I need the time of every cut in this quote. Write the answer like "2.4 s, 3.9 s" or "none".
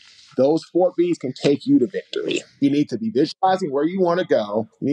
2.6 s